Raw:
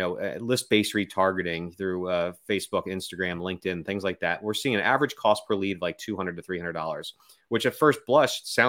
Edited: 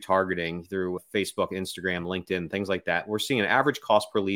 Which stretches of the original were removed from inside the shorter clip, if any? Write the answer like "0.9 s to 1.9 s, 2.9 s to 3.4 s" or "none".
2.1 s to 2.3 s